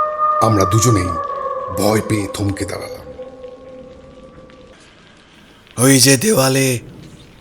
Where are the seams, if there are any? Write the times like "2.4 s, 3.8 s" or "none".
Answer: 4.7 s